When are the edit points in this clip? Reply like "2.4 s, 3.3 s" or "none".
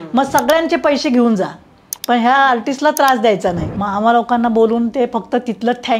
3.7 s